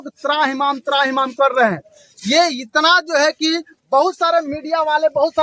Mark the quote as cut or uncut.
uncut